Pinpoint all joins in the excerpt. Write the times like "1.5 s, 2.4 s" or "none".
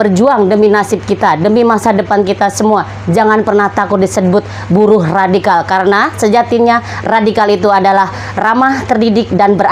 none